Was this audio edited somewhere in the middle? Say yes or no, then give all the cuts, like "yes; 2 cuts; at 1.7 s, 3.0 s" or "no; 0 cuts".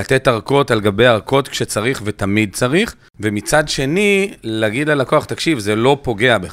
yes; 1 cut; at 3.0 s